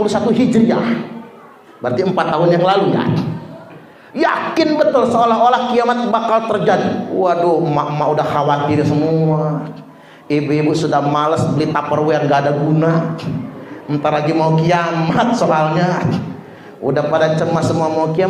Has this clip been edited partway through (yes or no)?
no